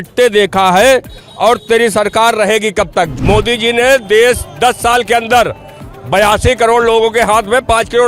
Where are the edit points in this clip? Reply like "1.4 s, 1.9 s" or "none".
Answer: 3.1 s

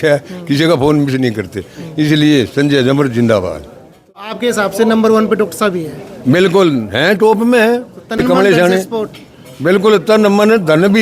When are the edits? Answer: 4.3 s, 8.2 s

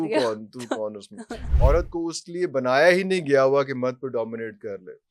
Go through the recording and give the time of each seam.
1.4 s

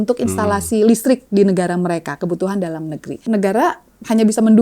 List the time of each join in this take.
3.2 s

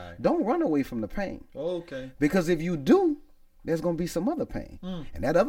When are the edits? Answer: none

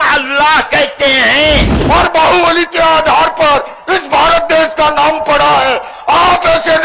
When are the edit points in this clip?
1.7 s

